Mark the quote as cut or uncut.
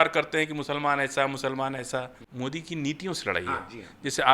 cut